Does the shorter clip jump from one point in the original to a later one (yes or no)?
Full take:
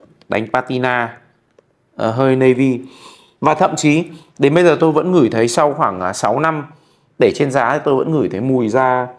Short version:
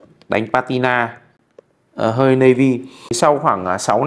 yes